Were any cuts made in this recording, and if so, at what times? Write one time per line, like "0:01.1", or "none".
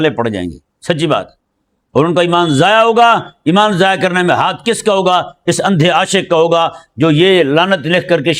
none

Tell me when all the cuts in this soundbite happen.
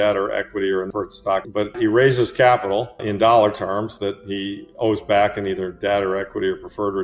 0:01.7
0:03.0

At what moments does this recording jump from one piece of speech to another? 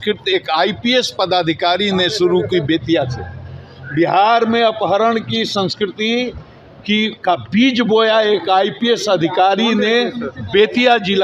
none

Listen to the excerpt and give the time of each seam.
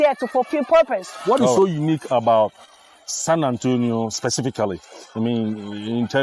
0:01.1

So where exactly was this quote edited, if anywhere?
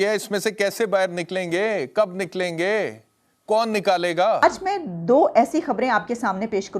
0:04.4

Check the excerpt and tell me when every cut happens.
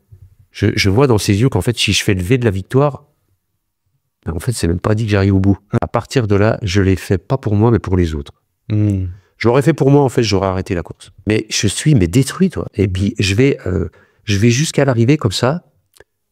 0:05.7
0:11.0

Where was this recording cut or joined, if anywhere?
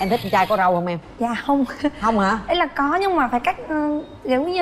none

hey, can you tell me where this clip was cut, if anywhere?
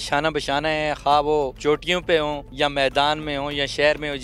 0:01.6
0:02.5

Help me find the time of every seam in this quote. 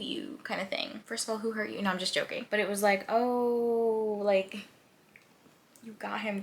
0:01.0
0:02.4

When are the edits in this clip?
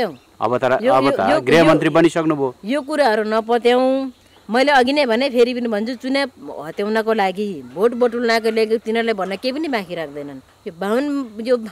0:10.5

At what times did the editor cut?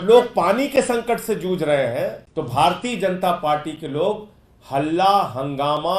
0:02.2

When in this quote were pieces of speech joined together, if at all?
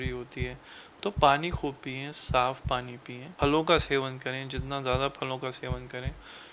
0:03.3

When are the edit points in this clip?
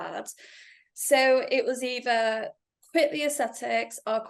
none

